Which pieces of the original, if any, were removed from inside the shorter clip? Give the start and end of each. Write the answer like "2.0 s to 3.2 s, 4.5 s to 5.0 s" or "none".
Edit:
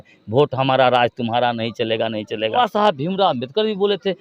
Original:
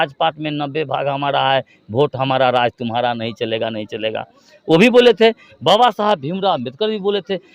4.2 s to 5.8 s